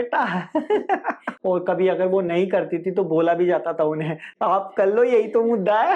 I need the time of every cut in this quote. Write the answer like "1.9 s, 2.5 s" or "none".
1.3 s, 4.3 s